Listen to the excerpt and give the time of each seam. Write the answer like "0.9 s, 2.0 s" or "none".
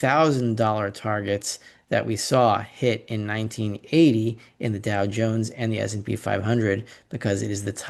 none